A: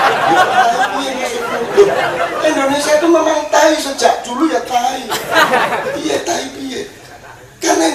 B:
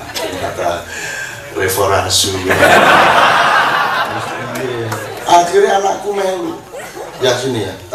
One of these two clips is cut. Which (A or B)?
B